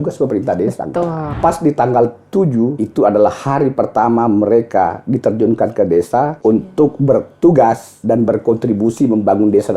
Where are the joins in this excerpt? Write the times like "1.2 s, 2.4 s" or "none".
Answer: 1.2 s, 2.8 s, 6.3 s, 7.9 s